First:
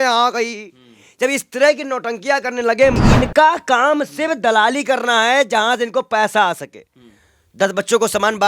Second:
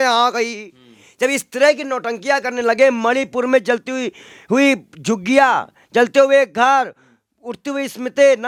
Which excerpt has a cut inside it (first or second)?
first